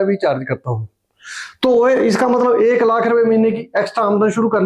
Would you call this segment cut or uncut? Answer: uncut